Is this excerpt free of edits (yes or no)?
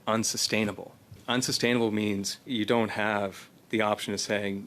no